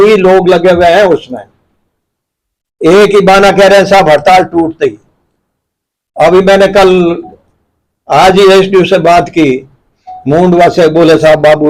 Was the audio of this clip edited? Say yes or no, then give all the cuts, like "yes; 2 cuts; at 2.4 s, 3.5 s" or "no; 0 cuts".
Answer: no; 0 cuts